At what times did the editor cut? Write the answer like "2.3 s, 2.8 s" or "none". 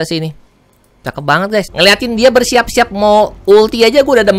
1.7 s